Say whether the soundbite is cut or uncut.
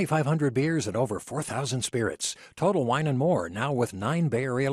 uncut